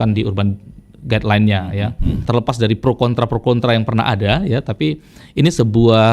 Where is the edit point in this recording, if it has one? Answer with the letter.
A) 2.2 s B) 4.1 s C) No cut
A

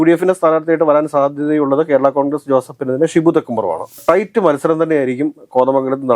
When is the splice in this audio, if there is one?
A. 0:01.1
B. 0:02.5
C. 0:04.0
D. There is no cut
C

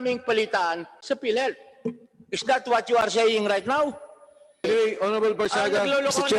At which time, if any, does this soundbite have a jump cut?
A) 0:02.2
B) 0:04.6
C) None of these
B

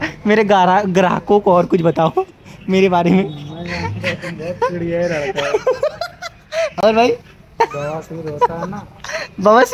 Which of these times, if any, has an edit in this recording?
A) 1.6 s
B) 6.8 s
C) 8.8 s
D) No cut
D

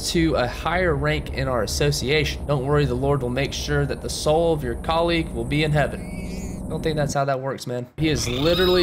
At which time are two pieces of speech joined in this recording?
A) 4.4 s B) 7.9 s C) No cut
B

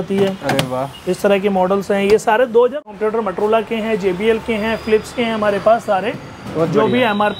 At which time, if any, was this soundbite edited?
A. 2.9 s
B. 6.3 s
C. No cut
A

